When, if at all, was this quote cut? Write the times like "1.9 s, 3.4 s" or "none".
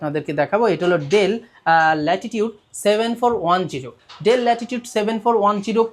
none